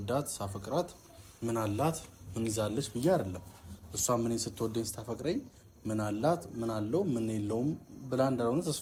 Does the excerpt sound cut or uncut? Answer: uncut